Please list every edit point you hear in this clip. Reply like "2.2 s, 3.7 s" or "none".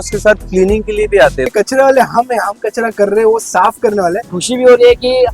1.5 s, 4.2 s